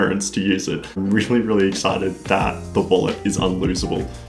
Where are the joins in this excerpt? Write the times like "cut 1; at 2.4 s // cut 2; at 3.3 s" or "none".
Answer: cut 1; at 1.0 s